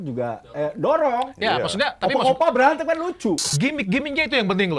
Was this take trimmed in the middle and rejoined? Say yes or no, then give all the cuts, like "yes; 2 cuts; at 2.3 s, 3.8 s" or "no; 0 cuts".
yes; 1 cut; at 3.5 s